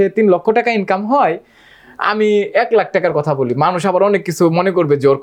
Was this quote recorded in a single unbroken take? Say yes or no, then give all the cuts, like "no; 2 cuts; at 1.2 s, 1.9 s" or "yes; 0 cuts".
yes; 0 cuts